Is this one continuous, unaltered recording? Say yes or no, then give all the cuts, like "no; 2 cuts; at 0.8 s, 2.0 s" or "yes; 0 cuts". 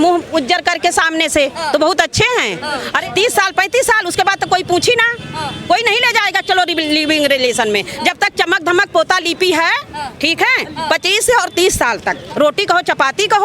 no; 2 cuts; at 3.0 s, 12.2 s